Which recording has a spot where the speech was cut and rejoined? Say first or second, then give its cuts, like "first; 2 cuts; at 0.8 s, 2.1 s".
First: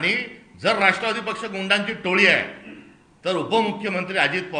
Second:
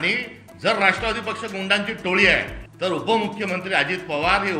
second; 1 cut; at 2.6 s